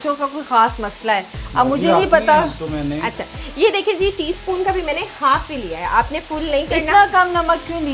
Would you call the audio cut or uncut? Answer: uncut